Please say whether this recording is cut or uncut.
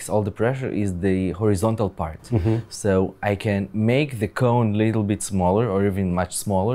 uncut